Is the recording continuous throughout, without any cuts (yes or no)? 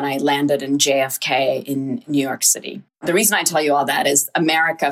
no